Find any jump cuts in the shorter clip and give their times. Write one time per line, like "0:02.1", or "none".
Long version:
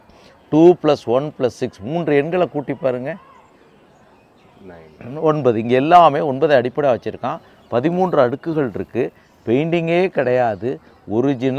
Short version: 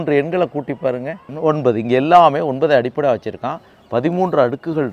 0:01.2